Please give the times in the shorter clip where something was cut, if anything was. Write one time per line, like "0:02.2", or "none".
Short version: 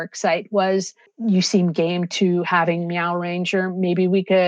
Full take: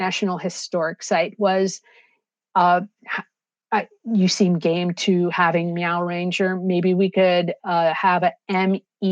0:01.1